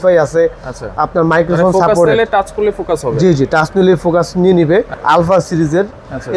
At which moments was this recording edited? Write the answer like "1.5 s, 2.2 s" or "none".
4.9 s